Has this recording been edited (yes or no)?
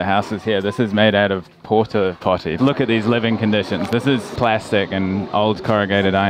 yes